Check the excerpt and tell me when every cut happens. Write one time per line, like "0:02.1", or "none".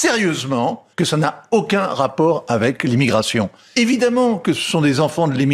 0:00.8
0:03.6